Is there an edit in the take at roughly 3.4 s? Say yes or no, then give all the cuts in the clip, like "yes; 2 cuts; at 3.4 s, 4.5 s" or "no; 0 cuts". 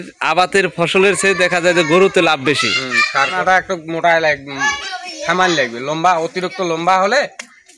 yes; 1 cut; at 3.4 s